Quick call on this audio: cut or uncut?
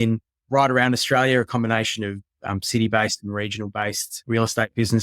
cut